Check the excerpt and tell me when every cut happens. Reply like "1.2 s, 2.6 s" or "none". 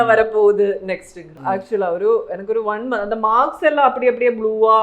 1.4 s